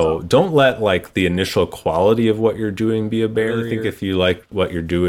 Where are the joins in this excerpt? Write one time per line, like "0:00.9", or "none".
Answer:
0:03.8